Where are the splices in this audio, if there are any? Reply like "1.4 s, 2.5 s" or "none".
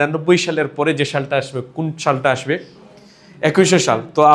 none

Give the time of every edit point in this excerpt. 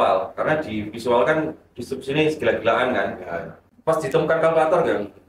3.6 s

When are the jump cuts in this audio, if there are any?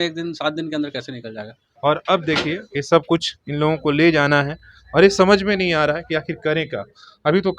1.6 s

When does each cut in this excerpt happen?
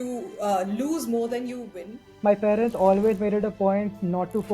2.2 s

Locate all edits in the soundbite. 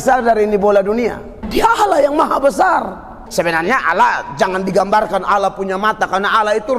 1.3 s, 3.2 s

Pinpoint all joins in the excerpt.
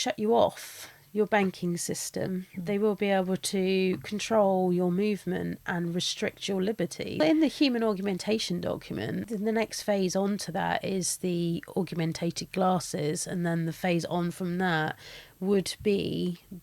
7.2 s, 9.3 s

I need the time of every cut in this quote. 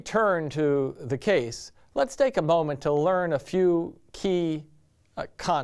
1.8 s

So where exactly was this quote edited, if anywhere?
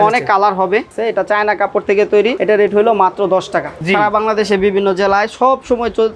1.0 s, 2.4 s, 3.7 s

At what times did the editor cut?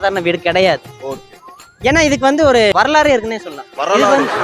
3.1 s

